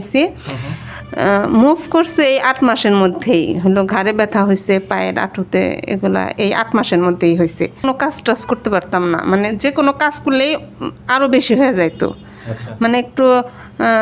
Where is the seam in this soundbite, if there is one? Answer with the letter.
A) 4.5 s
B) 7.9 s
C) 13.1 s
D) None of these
B